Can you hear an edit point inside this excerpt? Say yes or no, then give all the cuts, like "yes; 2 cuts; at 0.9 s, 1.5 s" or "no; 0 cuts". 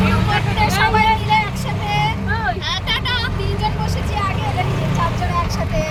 no; 0 cuts